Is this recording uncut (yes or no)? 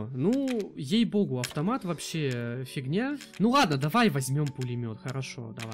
no